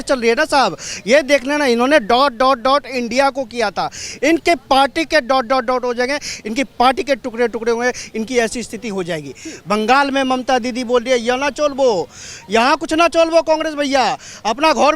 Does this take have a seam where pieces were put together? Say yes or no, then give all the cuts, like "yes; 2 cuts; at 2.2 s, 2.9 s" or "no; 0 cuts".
no; 0 cuts